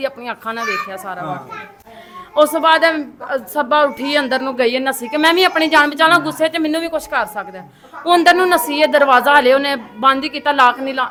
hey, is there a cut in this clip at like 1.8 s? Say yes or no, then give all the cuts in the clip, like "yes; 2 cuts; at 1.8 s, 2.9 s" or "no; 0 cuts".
no; 0 cuts